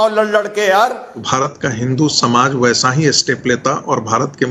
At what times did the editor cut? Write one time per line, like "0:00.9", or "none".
0:01.3

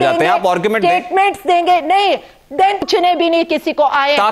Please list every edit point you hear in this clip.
0:02.9

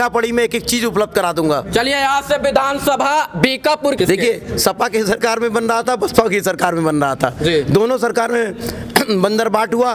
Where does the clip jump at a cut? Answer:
0:04.0

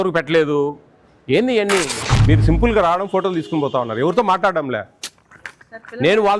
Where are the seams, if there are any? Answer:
0:02.2

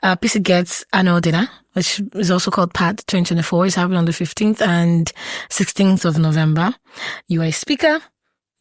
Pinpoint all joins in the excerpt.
none

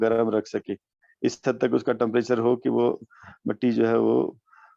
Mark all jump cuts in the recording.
none

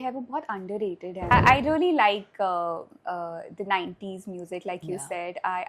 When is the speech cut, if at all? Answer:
0:01.3

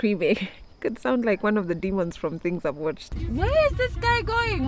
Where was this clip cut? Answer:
0:03.1

